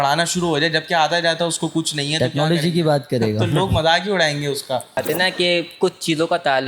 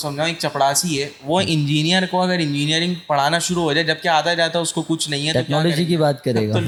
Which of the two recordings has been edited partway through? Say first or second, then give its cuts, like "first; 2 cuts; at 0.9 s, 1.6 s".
first; 1 cut; at 5.0 s